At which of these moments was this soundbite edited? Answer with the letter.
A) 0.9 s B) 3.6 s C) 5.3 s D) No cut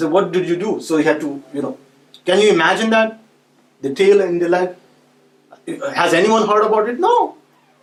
D